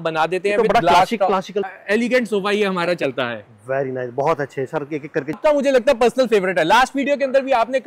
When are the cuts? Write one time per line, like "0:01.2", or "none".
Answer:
0:01.7
0:05.4